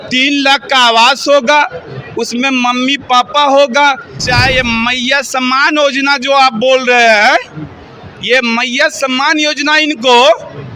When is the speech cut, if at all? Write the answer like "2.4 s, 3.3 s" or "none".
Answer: 4.2 s